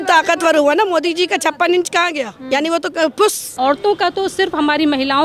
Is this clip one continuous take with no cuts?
no; 2 cuts; at 2.3 s, 3.5 s

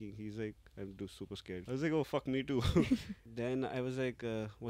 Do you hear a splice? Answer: yes; 2 cuts; at 1.6 s, 3.2 s

